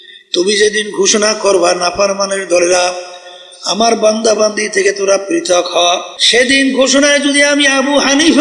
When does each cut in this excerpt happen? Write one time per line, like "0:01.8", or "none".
0:06.1